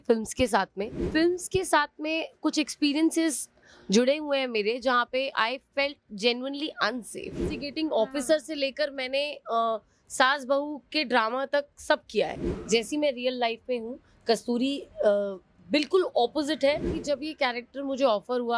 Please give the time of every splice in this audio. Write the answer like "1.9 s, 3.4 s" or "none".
1.0 s, 7.6 s, 12.5 s, 16.9 s